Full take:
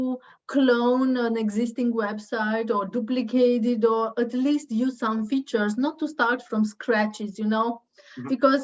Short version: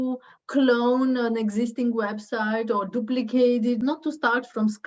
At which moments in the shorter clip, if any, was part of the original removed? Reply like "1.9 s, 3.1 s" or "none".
3.8 s